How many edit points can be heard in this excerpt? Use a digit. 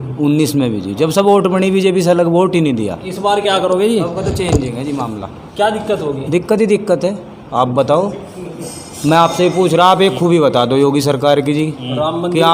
0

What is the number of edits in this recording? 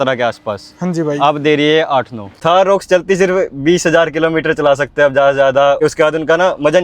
2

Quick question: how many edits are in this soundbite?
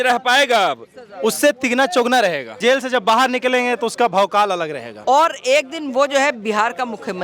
2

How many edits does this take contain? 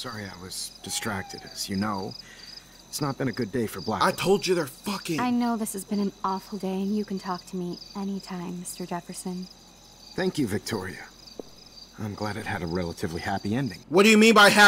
0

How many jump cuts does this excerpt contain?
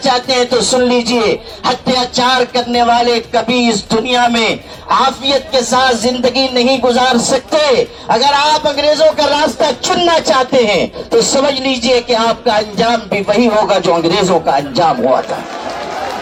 0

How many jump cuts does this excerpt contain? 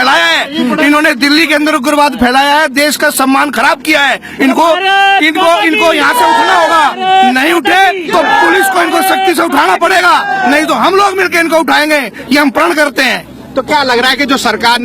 0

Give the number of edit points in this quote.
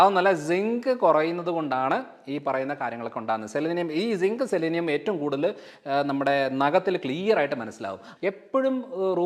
1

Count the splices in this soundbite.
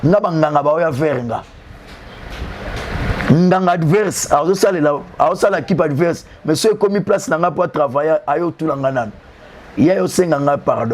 0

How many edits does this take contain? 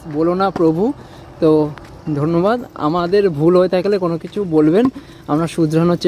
0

